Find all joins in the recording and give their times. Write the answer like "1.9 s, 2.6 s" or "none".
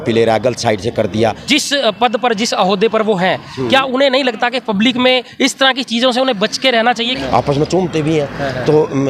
1.4 s, 7.2 s

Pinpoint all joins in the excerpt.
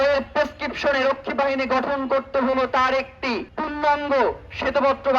3.5 s

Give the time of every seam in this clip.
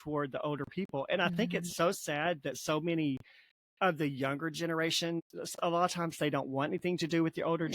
5.2 s

